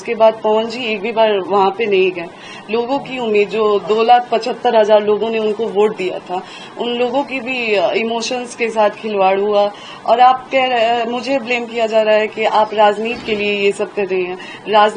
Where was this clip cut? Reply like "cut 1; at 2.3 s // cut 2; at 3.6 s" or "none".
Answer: none